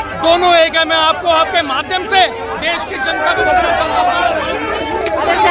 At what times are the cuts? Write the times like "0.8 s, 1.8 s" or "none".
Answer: none